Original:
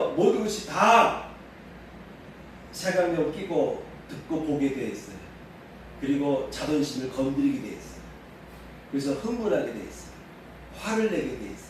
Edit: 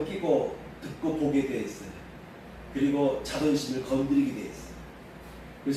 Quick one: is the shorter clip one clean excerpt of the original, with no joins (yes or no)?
yes